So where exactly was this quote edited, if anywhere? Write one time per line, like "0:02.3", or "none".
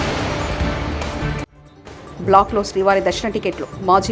none

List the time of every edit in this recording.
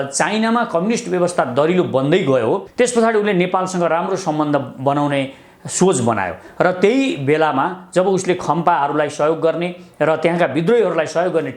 0:02.7

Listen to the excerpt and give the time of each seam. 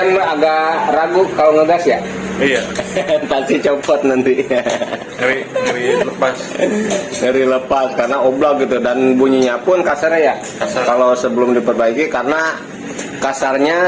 none

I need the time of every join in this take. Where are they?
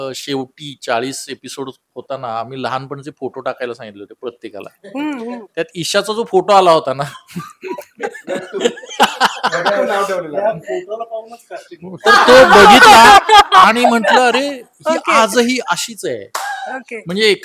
none

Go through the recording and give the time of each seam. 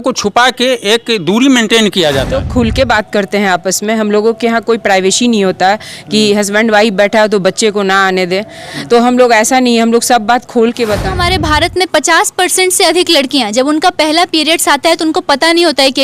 0:02.4
0:11.1

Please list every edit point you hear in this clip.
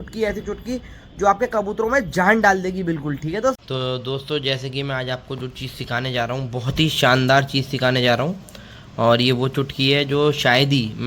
0:03.6

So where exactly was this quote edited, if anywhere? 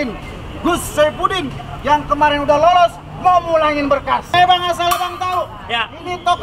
0:04.3

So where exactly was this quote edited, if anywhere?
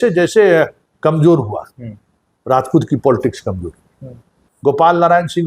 0:04.4

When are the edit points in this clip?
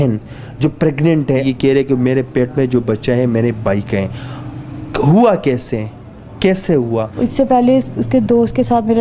0:01.4
0:07.1

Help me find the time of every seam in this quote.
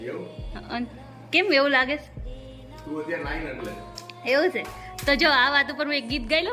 none

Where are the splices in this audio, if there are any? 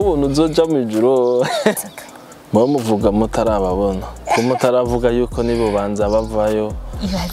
0:01.8

